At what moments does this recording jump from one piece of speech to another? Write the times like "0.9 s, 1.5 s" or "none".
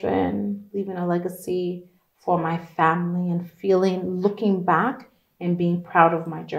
none